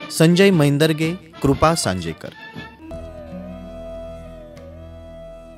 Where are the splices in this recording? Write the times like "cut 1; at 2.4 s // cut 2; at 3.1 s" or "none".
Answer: cut 1; at 2.7 s